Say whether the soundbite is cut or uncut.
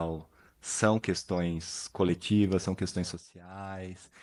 uncut